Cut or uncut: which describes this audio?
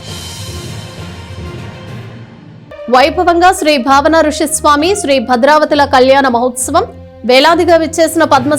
cut